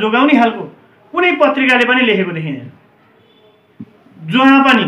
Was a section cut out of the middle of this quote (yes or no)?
no